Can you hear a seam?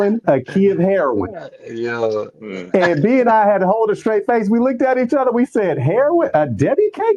no; 0 cuts

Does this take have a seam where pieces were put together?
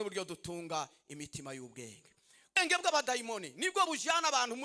yes; 1 cut; at 2.6 s

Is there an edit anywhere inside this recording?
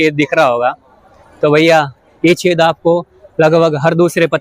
no; 0 cuts

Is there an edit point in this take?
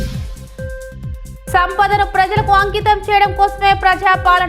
yes; 1 cut; at 1.5 s

